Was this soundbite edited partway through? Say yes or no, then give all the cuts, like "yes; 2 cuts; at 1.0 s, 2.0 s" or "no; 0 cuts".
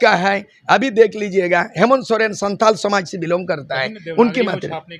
no; 0 cuts